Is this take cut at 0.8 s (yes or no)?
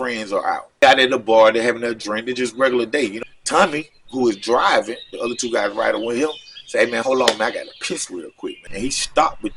yes